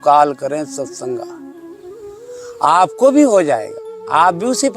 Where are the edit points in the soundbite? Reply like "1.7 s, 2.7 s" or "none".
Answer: 1.2 s, 2.6 s

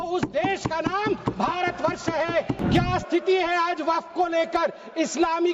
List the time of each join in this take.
2.6 s

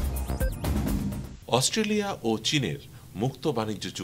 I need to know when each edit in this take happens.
1.2 s

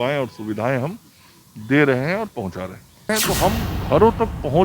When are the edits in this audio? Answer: 3.1 s

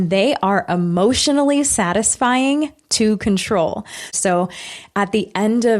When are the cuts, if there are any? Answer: 4.1 s

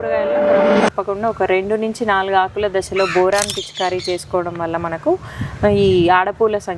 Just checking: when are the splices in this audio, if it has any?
none

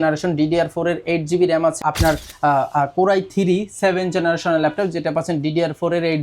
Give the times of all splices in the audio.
1.8 s

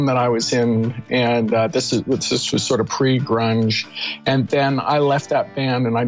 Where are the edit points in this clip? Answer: none

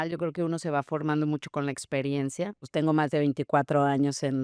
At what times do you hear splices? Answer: 2.6 s

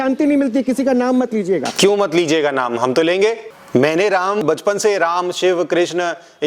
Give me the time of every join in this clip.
1.7 s, 3.5 s, 4.4 s

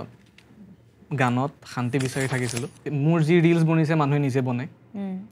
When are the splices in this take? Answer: 2.8 s

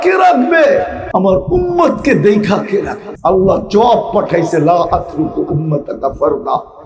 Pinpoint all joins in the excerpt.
1.0 s, 3.0 s

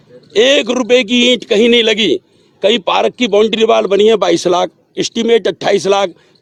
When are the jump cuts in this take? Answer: none

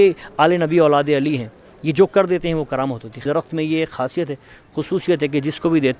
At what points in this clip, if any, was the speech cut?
3.2 s

